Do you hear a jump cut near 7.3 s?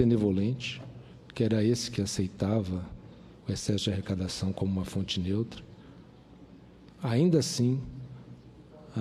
yes; 1 cut; at 7.3 s

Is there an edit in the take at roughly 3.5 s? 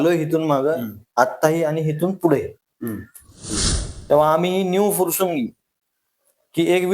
yes; 1 cut; at 3.5 s

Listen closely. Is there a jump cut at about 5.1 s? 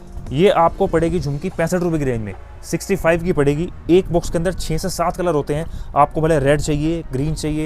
no; 0 cuts

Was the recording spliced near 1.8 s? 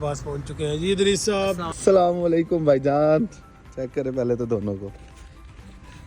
yes; 1 cut; at 1.8 s

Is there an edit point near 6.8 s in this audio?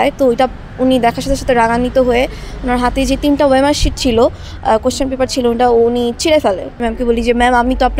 yes; 1 cut; at 6.8 s

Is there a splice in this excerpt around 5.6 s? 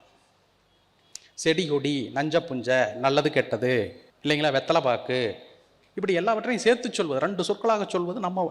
no; 1 cut; at 4.0 s

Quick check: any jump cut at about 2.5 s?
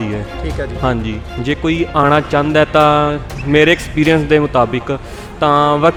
no; 0 cuts

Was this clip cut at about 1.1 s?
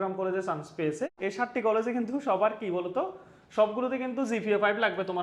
yes; 1 cut; at 1.1 s

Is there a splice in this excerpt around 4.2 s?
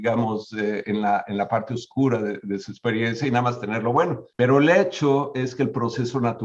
yes; 1 cut; at 4.2 s

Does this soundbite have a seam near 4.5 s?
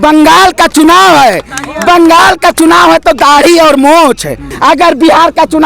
yes; 1 cut; at 4.5 s

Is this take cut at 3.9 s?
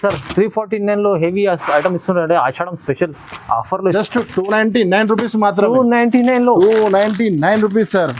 yes; 1 cut; at 3.9 s

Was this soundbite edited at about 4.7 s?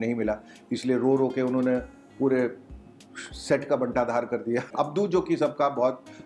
yes; 1 cut; at 4.7 s

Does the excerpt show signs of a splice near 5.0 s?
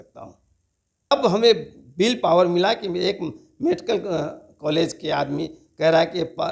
no; 1 cut; at 1.1 s

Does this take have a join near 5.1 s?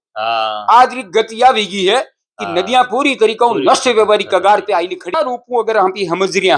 yes; 1 cut; at 5.1 s

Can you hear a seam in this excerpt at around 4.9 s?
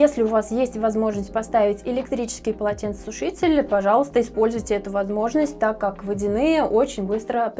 no; 0 cuts

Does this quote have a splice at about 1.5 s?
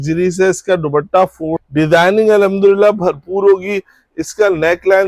yes; 1 cut; at 1.5 s

